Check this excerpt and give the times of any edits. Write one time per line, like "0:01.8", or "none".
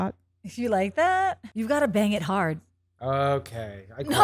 0:01.4